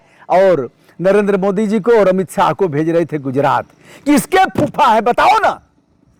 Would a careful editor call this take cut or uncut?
uncut